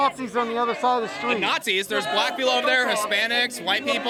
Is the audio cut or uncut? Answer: uncut